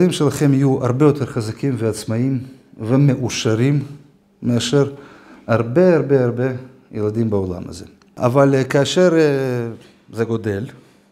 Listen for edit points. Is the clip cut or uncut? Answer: cut